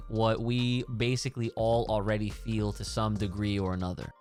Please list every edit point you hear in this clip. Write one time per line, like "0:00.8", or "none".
none

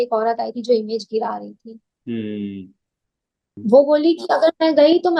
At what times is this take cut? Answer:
0:03.5

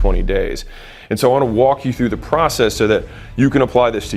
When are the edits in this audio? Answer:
0:01.6

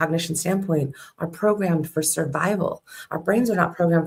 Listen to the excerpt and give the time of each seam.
none

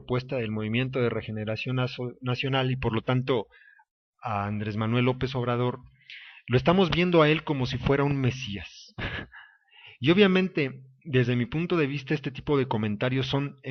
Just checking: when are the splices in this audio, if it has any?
none

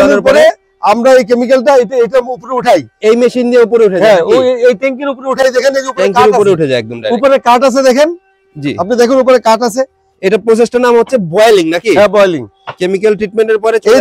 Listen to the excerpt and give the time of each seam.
none

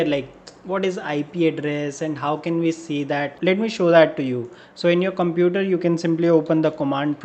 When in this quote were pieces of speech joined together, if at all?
none

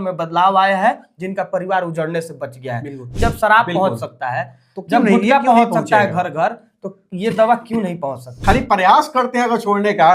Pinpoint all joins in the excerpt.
0:03.1
0:08.4

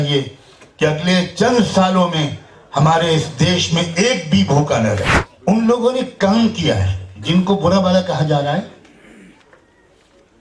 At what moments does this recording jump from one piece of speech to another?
0:05.2

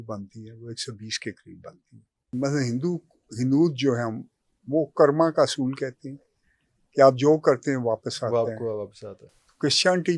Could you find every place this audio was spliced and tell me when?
0:02.3

